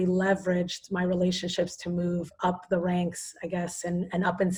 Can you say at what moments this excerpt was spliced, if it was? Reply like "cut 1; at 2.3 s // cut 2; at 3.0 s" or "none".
none